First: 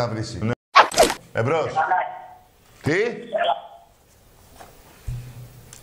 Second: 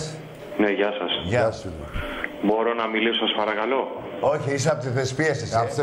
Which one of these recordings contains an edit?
first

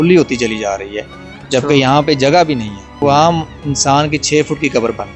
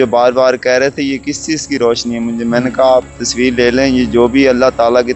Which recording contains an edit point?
first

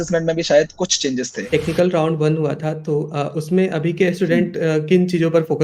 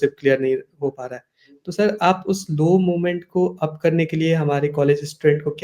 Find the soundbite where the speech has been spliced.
first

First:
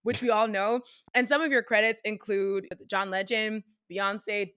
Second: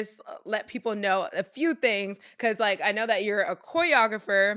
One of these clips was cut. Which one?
first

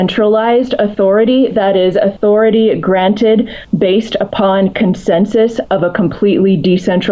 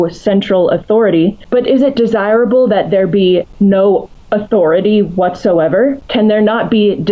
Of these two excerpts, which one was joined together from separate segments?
second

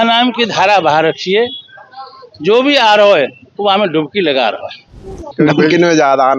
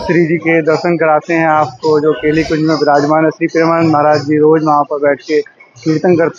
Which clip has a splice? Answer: first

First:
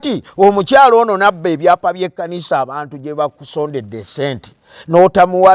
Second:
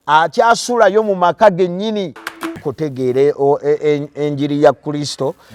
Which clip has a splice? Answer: second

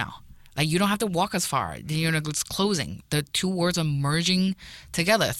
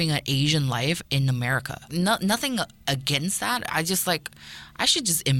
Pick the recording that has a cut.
second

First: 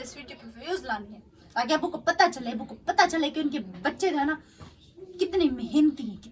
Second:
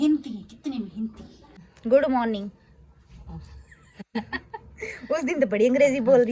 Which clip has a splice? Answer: second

